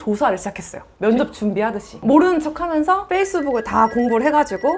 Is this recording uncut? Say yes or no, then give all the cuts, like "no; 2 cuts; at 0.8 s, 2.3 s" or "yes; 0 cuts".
yes; 0 cuts